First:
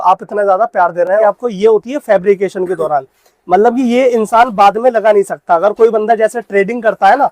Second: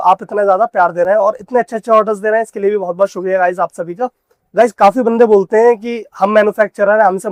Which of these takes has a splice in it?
first; 1 cut; at 1.1 s

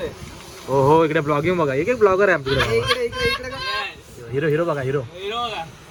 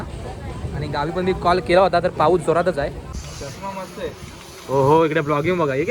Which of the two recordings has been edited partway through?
second; 1 cut; at 3.1 s

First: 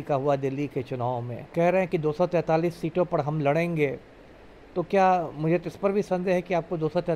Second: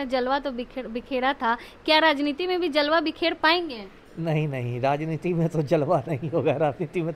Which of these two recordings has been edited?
first; 1 cut; at 1.5 s

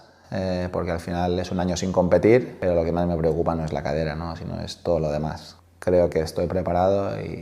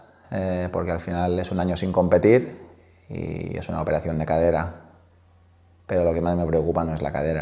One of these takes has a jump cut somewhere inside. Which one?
first; 2 cuts; at 2.5 s, 5.6 s

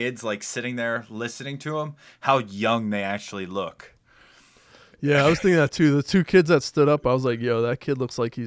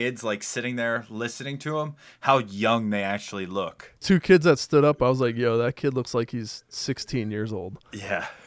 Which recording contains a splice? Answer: second; 1 cut; at 4.0 s

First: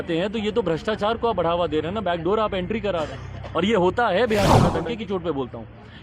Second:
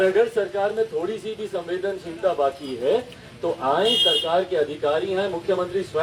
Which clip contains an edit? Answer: first; 1 cut; at 4.7 s

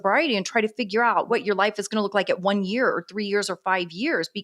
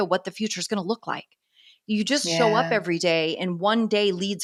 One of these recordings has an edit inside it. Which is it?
first; 1 cut; at 1.3 s

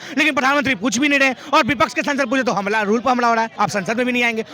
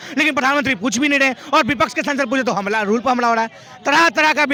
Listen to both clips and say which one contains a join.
first; 1 cut; at 3.5 s

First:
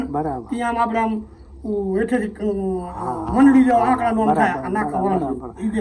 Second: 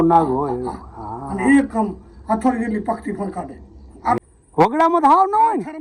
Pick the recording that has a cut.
second; 1 cut; at 4.2 s

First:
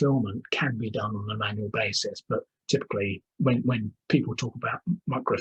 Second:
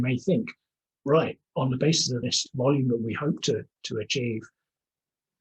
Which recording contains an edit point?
second; 1 cut; at 2.1 s

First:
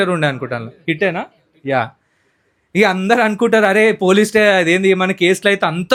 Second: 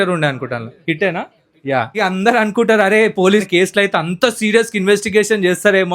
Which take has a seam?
second; 2 cuts; at 2.0 s, 3.4 s

